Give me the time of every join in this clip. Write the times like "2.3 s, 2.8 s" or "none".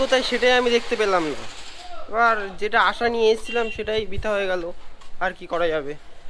none

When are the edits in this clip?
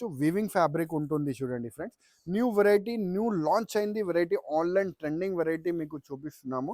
none

